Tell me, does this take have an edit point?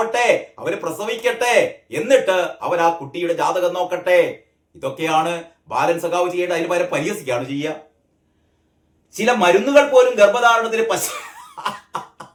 no; 0 cuts

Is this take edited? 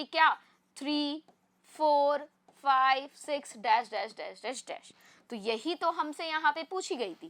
no; 0 cuts

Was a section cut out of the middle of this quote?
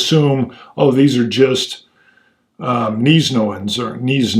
no; 0 cuts

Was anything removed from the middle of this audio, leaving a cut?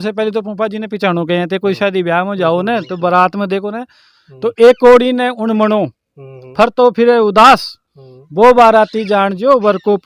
no; 0 cuts

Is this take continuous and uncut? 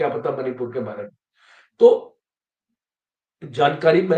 yes; 0 cuts

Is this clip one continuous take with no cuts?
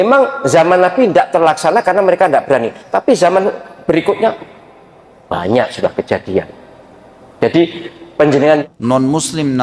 no; 1 cut; at 8.6 s

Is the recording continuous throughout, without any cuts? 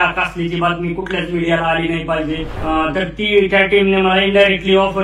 no; 1 cut; at 2.5 s

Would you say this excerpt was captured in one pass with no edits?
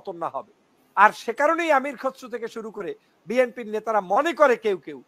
yes; 0 cuts

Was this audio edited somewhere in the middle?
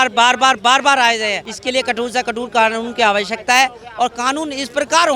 yes; 1 cut; at 1.5 s

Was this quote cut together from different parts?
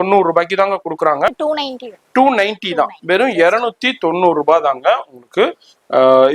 yes; 1 cut; at 1.3 s

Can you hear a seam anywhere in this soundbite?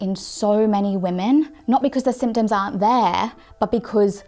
no; 0 cuts

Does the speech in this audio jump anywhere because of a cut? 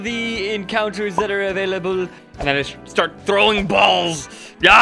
yes; 1 cut; at 2.2 s

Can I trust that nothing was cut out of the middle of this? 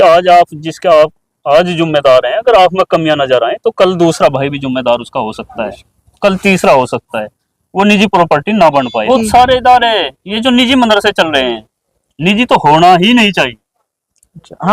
no; 1 cut; at 9.1 s

